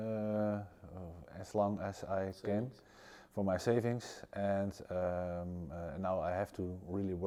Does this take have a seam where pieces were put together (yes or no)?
no